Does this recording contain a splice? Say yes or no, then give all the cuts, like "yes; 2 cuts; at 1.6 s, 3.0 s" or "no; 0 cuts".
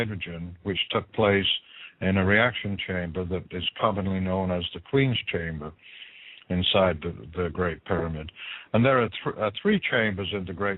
yes; 1 cut; at 9.3 s